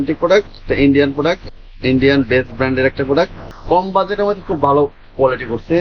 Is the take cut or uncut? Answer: cut